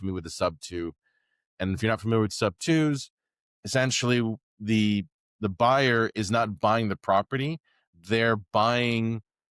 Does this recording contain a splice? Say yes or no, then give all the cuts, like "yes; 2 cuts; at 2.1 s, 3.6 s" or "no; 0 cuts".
no; 0 cuts